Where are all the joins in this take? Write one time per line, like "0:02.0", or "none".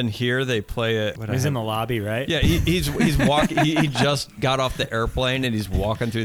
0:01.2